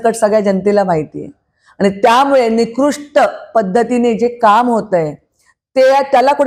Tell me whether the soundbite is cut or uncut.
uncut